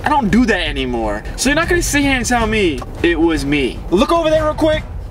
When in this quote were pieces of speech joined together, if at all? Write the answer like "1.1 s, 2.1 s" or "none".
1.3 s, 2.9 s, 3.8 s